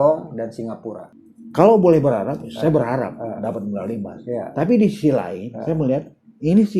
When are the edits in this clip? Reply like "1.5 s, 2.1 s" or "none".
1.0 s